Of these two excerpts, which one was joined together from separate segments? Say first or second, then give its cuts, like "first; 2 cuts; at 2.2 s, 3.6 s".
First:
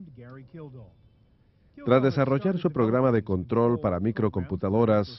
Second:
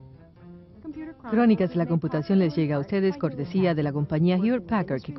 second; 1 cut; at 3.8 s